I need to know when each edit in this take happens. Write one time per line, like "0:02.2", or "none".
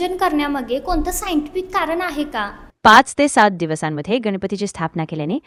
none